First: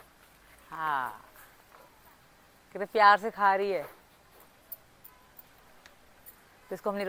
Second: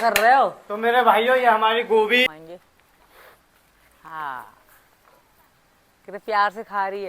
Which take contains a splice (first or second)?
second